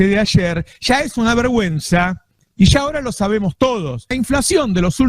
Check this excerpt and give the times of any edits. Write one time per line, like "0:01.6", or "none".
0:04.1